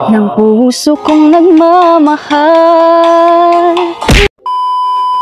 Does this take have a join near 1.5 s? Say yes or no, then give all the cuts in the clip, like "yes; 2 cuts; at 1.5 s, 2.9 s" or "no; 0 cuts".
no; 1 cut; at 4.3 s